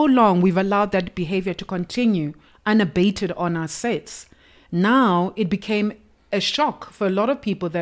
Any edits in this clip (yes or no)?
no